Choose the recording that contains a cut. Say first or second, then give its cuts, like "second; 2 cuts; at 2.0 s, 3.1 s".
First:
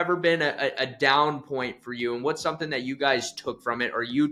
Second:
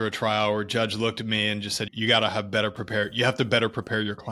second; 1 cut; at 1.8 s